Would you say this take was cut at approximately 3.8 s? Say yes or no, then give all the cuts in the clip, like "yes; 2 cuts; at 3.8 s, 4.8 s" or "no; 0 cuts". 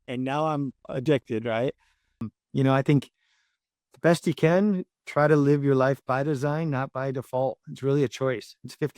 no; 1 cut; at 2.2 s